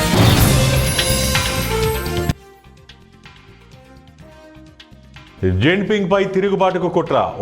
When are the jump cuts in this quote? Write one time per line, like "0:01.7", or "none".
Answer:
0:05.4